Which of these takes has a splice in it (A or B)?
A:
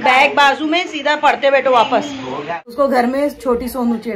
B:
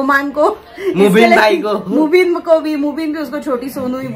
A